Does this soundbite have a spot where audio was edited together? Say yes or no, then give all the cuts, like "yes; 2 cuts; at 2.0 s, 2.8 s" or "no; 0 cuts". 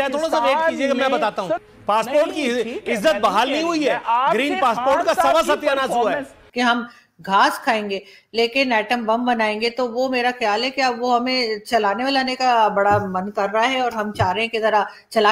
yes; 2 cuts; at 1.7 s, 6.4 s